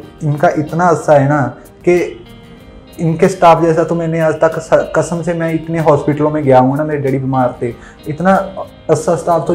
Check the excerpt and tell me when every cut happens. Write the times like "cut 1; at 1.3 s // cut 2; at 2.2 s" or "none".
none